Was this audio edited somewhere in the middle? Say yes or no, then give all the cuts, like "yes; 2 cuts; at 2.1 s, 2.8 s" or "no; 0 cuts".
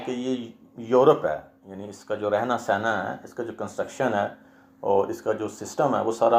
no; 0 cuts